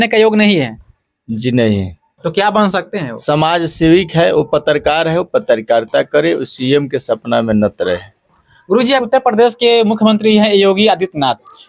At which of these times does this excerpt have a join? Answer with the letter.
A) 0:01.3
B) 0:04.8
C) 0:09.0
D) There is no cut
C